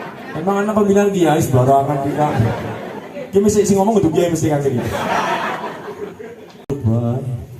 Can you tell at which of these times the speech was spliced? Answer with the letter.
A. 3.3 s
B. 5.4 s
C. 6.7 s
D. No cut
C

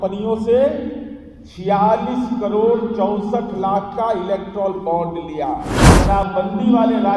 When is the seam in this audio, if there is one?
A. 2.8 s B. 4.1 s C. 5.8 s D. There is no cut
C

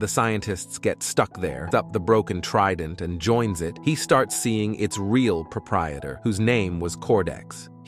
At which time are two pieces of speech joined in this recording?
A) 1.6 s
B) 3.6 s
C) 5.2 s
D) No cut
A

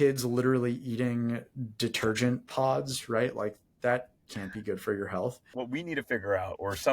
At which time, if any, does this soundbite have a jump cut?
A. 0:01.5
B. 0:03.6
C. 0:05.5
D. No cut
C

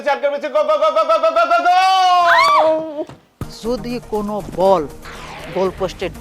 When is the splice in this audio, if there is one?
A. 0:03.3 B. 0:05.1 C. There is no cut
A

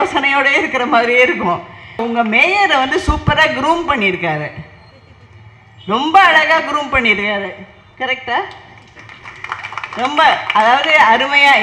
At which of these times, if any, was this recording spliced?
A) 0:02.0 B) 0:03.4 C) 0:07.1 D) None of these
A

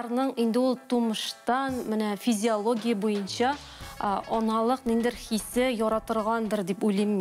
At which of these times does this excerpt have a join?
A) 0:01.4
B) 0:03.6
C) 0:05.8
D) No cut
D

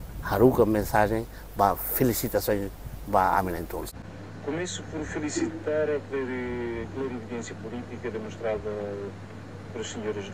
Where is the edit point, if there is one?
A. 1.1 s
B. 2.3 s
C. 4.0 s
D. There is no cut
C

